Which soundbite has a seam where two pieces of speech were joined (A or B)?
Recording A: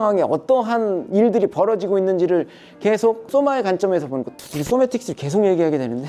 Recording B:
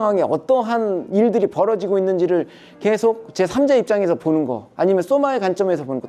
A